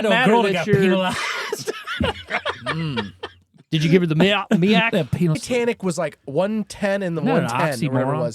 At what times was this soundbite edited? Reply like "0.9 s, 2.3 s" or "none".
5.4 s